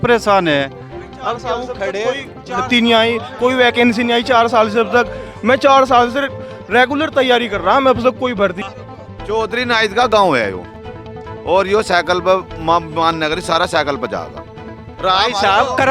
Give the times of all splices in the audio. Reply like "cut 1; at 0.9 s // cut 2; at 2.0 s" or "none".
cut 1; at 8.6 s